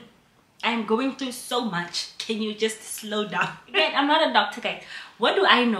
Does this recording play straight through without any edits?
no; 1 cut; at 3.8 s

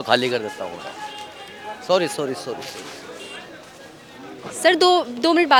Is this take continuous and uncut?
yes; 0 cuts

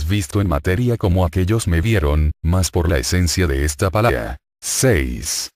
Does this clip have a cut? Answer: no; 0 cuts

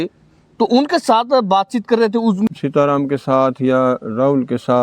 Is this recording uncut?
no; 1 cut; at 2.5 s

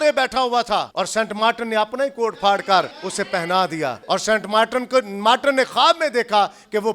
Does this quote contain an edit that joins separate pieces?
yes; 3 cuts; at 0.9 s, 3.0 s, 4.0 s

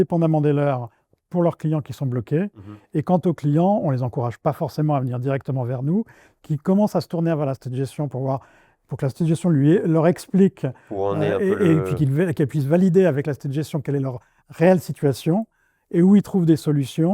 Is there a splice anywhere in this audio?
no; 0 cuts

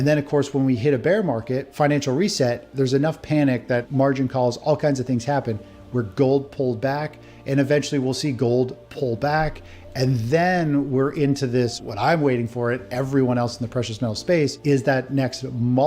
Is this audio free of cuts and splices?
no; 4 cuts; at 1.7 s, 3.9 s, 11.8 s, 14.6 s

